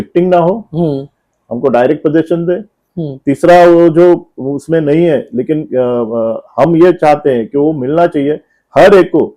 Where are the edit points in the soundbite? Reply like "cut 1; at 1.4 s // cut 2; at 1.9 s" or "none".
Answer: none